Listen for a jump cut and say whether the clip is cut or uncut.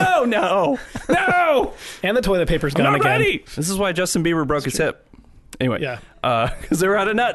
cut